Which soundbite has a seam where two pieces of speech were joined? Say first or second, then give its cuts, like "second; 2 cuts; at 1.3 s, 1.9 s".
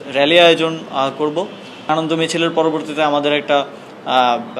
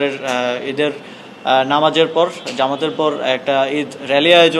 first; 1 cut; at 1.9 s